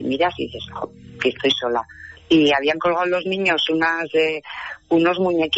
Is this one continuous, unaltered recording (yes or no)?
yes